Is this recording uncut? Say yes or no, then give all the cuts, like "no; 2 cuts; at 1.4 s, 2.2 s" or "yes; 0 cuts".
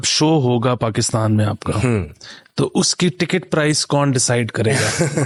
yes; 0 cuts